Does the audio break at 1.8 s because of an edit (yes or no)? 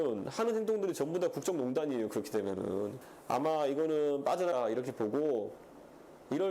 no